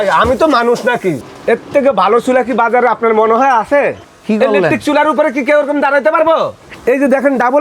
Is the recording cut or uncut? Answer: cut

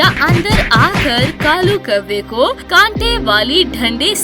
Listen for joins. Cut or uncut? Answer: uncut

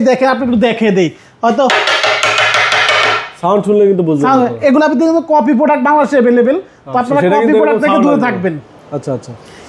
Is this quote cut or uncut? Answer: uncut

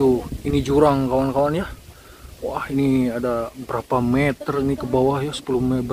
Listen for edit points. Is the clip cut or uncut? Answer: uncut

